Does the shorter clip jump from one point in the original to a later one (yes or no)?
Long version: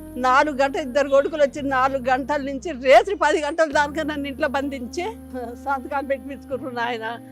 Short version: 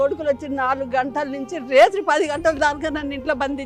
no